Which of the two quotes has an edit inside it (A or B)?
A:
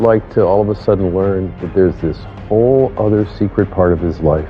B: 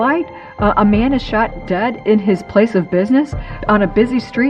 B